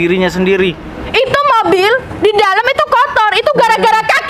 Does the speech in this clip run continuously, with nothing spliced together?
no; 1 cut; at 1.1 s

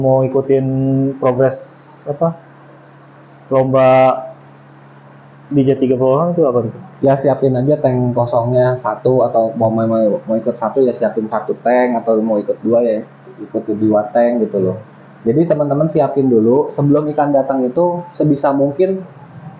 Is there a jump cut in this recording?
no; 0 cuts

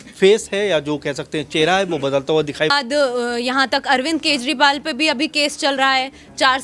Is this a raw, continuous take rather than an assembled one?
no; 1 cut; at 2.7 s

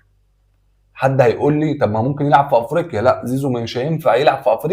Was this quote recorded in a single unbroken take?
yes; 0 cuts

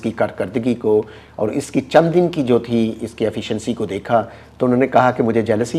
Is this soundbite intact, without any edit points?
yes; 0 cuts

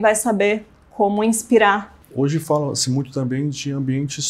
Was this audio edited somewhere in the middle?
yes; 1 cut; at 2.0 s

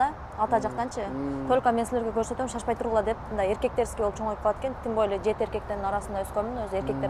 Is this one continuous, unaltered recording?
yes; 0 cuts

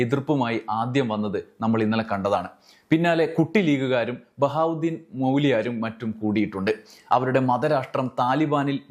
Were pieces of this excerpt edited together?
no; 0 cuts

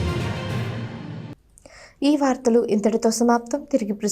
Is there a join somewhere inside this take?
no; 0 cuts

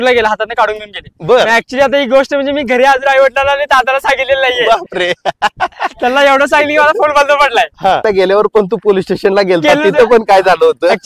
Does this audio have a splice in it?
yes; 1 cut; at 8.0 s

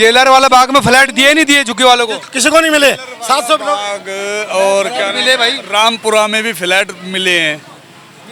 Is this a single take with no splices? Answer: yes; 0 cuts

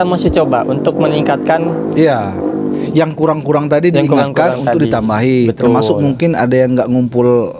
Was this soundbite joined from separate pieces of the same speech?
no; 0 cuts

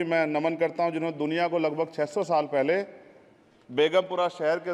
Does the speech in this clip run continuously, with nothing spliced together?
yes; 0 cuts

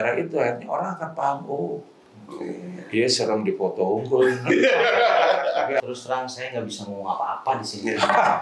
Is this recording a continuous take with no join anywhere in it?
no; 1 cut; at 5.8 s

